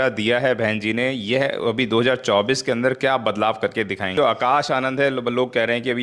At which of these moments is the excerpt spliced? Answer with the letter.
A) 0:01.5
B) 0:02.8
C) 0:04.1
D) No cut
C